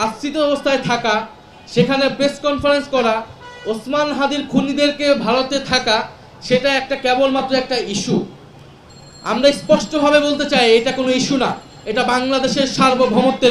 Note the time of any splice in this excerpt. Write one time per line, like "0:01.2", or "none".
none